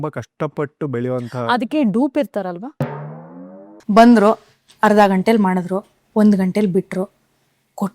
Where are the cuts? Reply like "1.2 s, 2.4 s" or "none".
3.7 s